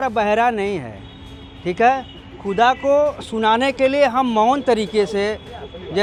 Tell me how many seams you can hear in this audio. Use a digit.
0